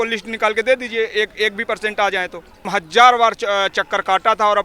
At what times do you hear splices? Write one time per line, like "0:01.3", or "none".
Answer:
0:02.7